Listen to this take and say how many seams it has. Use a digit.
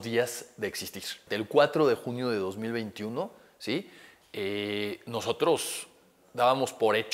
1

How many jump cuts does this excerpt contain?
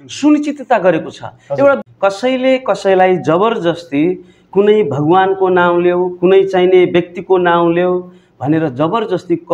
1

